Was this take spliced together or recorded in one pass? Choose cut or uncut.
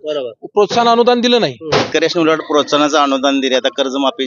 cut